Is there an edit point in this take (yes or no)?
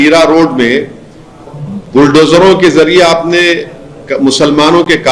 no